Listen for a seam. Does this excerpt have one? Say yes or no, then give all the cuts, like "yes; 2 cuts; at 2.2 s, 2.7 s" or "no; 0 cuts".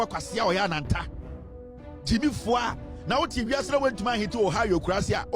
no; 0 cuts